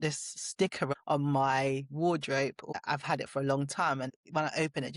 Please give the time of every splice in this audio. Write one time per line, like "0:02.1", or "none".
0:00.9
0:02.7
0:04.1